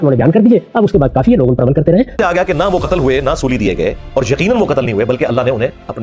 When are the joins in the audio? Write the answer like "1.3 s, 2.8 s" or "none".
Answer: 2.2 s